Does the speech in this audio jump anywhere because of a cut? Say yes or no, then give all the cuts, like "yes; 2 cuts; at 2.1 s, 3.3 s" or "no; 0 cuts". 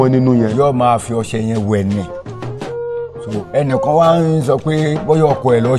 yes; 2 cuts; at 2.0 s, 3.2 s